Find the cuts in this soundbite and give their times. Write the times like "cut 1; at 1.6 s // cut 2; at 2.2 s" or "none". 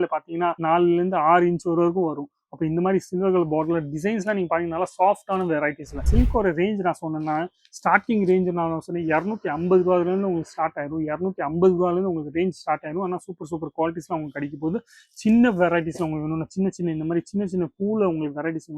cut 1; at 6.0 s

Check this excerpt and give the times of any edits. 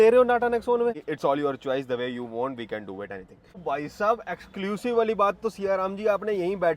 cut 1; at 1.0 s // cut 2; at 3.6 s

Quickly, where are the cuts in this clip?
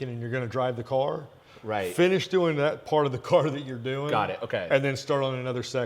none

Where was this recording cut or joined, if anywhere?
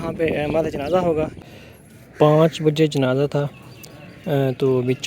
cut 1; at 1.4 s

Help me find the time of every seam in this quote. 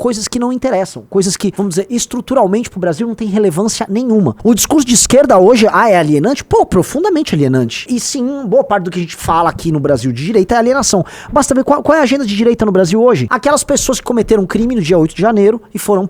cut 1; at 1.5 s // cut 2; at 4.4 s // cut 3; at 7.8 s // cut 4; at 13.3 s

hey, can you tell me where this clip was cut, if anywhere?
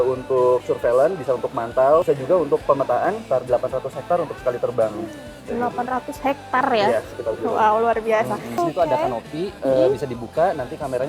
cut 1; at 2.0 s // cut 2; at 3.2 s // cut 3; at 8.6 s

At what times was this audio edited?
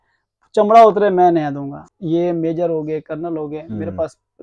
cut 1; at 1.9 s

